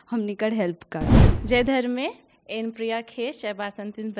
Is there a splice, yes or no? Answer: yes